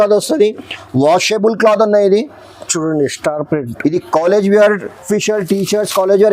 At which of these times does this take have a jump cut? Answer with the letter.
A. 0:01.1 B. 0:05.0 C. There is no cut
B